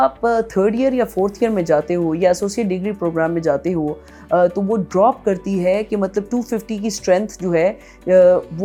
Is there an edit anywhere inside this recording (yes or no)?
no